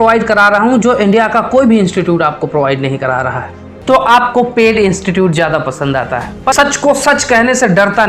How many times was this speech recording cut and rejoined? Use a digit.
2